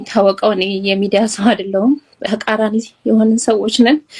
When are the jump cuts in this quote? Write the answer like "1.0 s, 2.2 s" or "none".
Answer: 2.2 s